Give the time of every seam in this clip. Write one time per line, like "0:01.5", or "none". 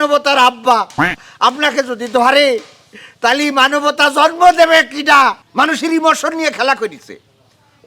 0:05.4